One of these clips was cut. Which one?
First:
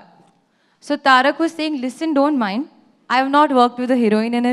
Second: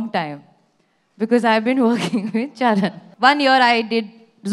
second; 1 cut; at 3.0 s

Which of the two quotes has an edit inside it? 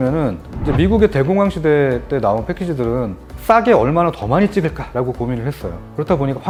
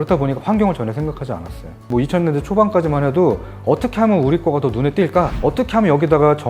second; 2 cuts; at 1.8 s, 5.3 s

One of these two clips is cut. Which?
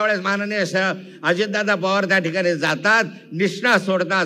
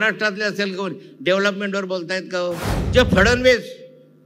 second; 1 cut; at 2.7 s

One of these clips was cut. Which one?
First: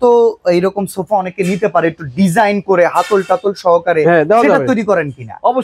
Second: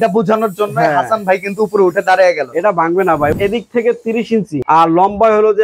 second; 2 cuts; at 3.3 s, 4.6 s

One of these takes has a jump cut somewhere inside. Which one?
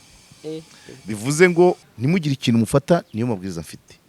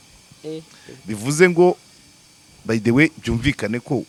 first; 1 cut; at 1.9 s

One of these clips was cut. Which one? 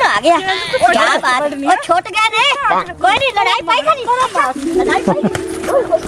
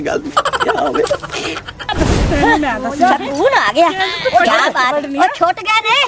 second; 1 cut; at 1.9 s

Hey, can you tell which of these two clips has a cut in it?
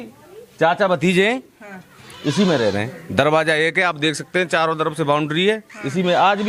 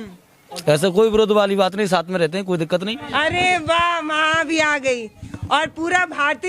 second; 1 cut; at 2.9 s

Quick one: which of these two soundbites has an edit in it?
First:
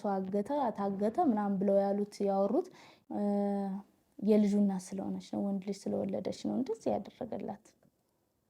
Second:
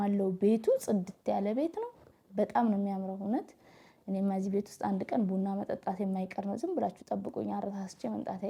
first; 1 cut; at 2.9 s

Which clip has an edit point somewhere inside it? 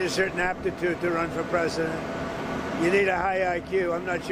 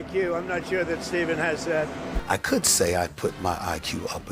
second; 1 cut; at 2.2 s

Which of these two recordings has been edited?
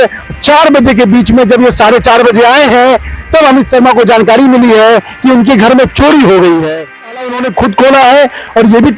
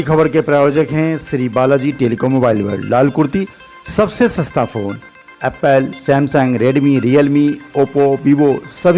first; 1 cut; at 7.3 s

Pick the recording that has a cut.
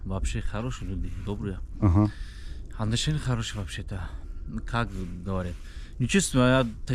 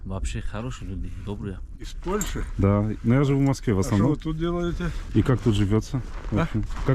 second; 2 cuts; at 1.7 s, 4.9 s

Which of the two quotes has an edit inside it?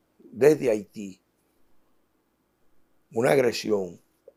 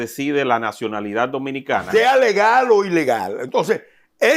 second; 1 cut; at 1.9 s

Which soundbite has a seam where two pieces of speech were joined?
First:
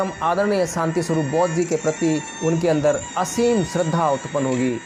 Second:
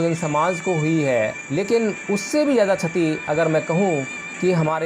second; 1 cut; at 1.4 s

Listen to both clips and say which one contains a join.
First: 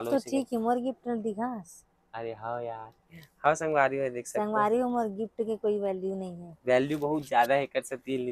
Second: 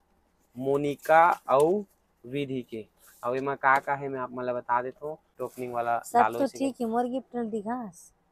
second; 1 cut; at 5.3 s

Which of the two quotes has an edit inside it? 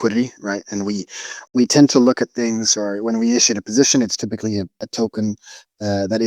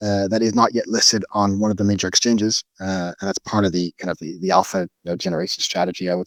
first; 2 cuts; at 1.5 s, 4.8 s

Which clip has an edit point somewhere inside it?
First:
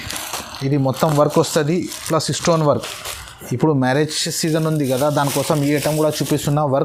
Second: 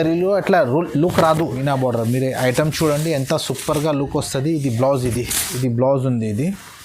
second; 2 cuts; at 1.5 s, 5.4 s

